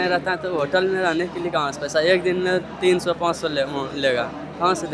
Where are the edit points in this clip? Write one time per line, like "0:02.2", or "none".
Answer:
none